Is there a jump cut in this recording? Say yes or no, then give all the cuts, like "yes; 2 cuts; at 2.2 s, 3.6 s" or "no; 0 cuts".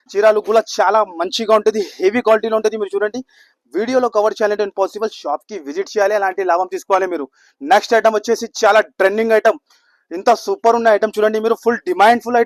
no; 0 cuts